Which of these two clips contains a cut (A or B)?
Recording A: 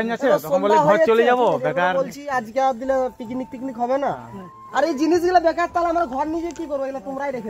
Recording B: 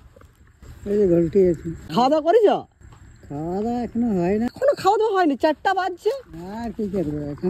B